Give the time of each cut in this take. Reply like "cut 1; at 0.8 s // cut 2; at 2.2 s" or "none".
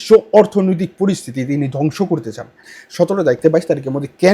cut 1; at 2.8 s

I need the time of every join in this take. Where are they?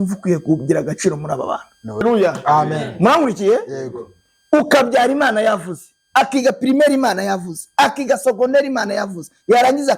cut 1; at 2.0 s

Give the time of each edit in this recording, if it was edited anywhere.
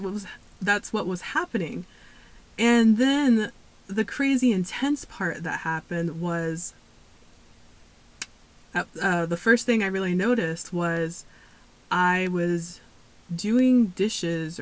none

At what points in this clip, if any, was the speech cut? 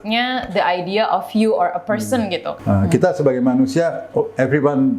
cut 1; at 2.5 s

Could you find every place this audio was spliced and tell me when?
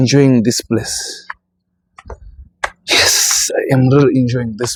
none

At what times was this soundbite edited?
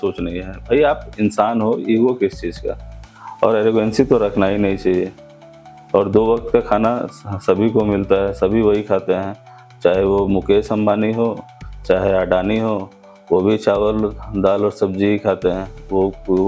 none

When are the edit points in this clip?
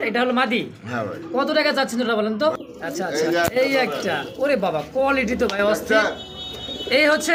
cut 1; at 2.5 s

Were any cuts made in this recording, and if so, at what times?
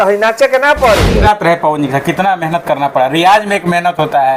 cut 1; at 1.1 s

